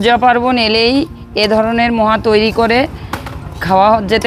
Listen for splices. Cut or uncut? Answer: uncut